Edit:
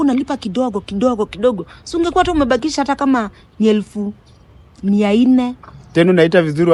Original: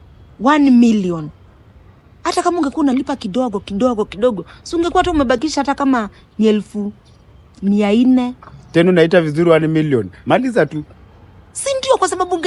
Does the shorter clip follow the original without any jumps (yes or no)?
yes